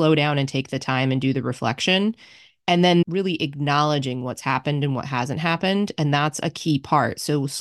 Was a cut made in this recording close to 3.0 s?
yes; 1 cut; at 3.0 s

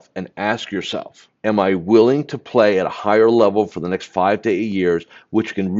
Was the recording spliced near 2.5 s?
no; 1 cut; at 1.2 s

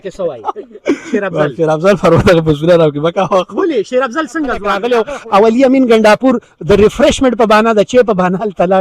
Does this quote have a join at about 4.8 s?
yes; 1 cut; at 4.8 s

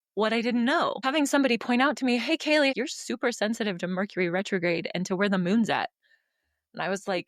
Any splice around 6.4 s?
no; 2 cuts; at 1.0 s, 2.7 s

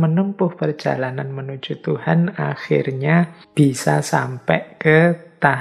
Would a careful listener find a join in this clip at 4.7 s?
no; 1 cut; at 3.4 s

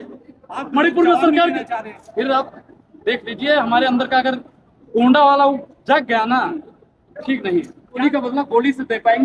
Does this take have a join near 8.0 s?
yes; 1 cut; at 8.0 s

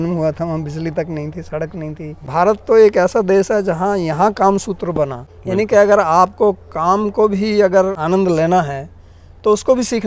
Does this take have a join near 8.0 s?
yes; 3 cuts; at 2.2 s, 5.3 s, 8.0 s

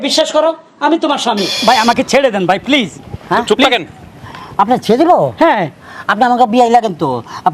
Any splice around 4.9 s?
no; 1 cut; at 1.5 s

